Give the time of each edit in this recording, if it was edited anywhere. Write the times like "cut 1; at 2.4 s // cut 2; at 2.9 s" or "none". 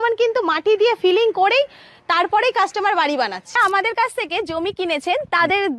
cut 1; at 3.6 s